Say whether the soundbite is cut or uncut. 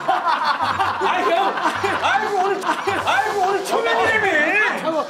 cut